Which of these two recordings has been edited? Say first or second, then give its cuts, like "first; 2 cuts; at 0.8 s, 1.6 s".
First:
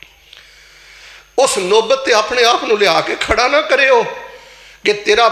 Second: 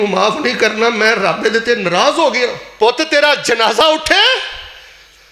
second; 1 cut; at 2.6 s